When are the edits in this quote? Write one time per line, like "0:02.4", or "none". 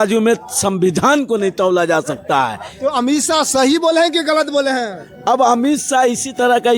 none